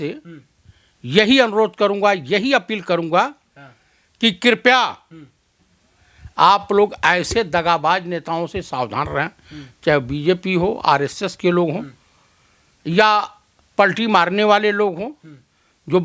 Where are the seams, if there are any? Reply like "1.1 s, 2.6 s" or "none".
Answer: none